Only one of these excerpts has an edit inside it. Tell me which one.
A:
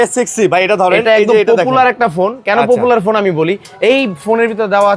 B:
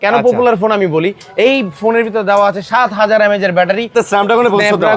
B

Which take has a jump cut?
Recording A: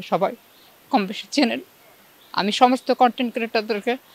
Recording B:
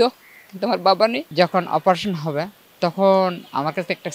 B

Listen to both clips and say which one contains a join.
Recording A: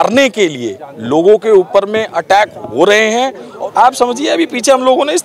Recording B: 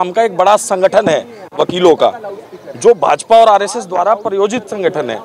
A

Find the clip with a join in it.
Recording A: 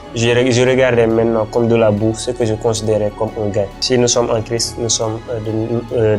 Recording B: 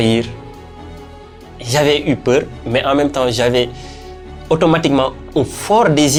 A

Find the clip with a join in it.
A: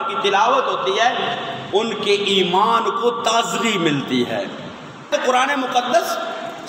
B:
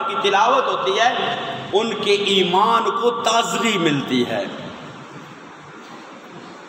A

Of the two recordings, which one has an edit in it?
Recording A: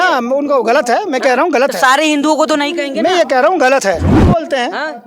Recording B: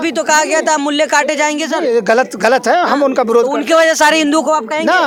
A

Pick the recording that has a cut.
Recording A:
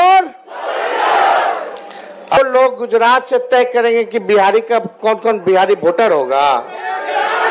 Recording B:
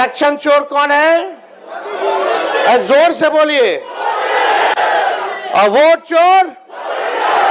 A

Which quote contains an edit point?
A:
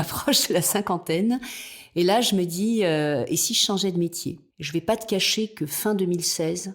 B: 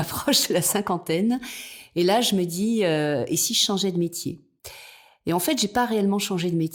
A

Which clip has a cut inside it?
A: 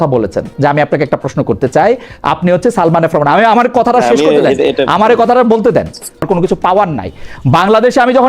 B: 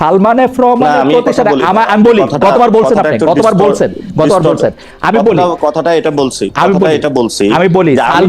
A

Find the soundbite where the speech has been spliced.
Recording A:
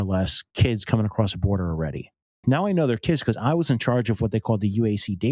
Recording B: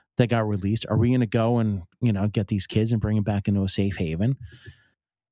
A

